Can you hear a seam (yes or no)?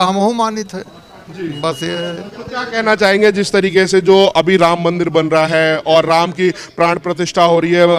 no